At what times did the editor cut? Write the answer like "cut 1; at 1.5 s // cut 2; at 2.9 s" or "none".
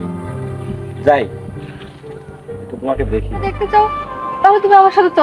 cut 1; at 3.6 s